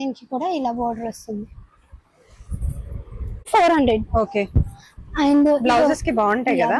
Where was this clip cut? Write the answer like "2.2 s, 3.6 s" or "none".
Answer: 3.5 s